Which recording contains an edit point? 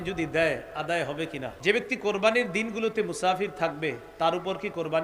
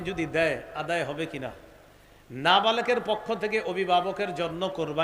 first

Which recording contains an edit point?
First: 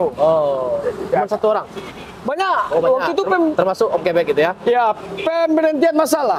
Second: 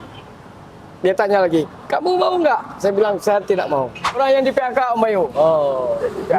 second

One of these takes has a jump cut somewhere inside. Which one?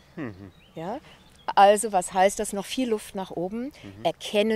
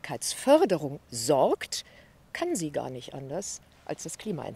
first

